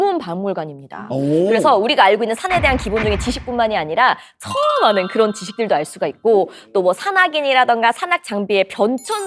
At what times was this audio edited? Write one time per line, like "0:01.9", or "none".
none